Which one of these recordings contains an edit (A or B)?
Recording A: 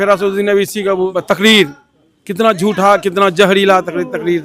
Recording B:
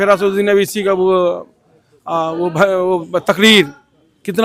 A